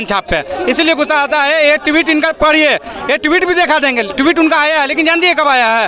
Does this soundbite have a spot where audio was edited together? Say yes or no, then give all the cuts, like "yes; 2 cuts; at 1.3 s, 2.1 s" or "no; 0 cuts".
no; 0 cuts